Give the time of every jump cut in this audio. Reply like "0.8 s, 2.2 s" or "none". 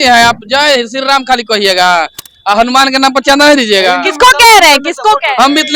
none